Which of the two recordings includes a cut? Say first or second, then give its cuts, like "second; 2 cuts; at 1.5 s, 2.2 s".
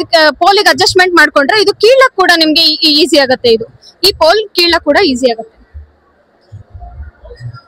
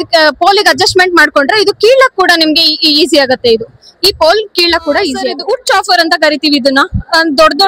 second; 1 cut; at 5.4 s